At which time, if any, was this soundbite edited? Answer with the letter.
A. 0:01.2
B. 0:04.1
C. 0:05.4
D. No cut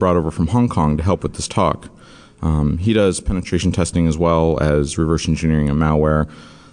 C